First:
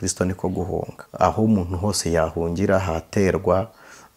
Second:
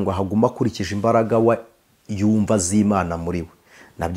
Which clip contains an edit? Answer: first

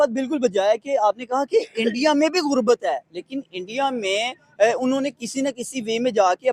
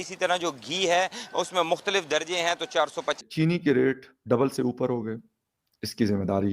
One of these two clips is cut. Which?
second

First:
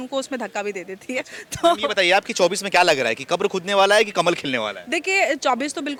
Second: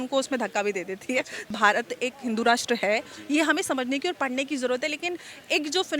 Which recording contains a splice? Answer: second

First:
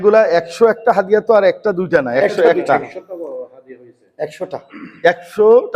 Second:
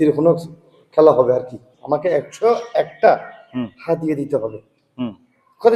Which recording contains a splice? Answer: second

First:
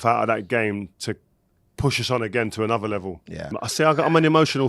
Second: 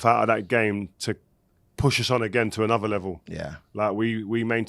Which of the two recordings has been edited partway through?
first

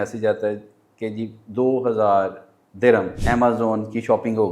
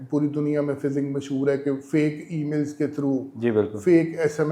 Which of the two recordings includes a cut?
first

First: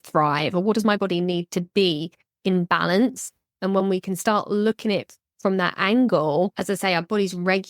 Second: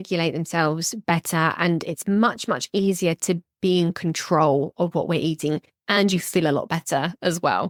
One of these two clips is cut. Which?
first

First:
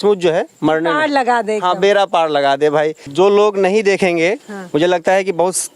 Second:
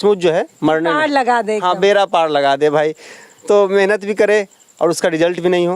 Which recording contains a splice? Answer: first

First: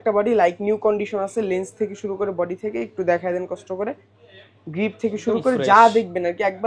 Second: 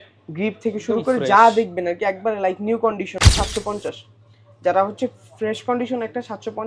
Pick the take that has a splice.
second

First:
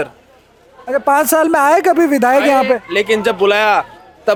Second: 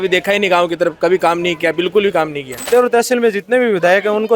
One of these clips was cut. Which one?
second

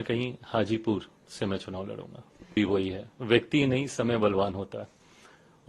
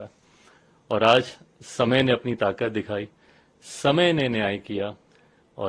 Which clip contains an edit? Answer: first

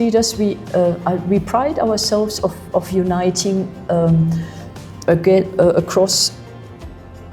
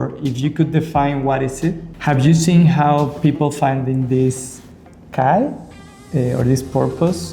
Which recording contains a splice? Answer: second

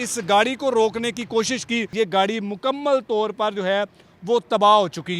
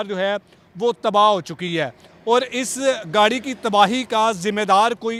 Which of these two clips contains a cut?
first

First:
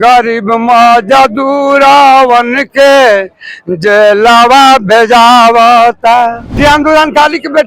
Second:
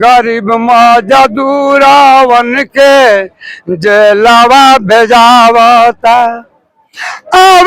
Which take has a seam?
first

